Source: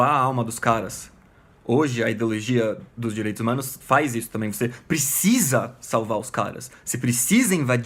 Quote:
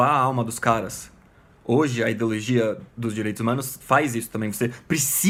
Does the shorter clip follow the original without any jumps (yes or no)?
yes